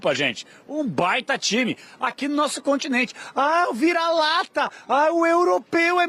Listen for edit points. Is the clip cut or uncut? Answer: uncut